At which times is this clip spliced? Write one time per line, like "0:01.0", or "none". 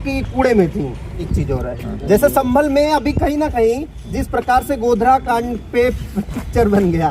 0:01.3